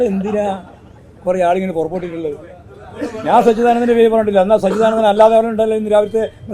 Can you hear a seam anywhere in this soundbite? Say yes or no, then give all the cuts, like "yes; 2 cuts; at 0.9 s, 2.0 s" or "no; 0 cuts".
no; 0 cuts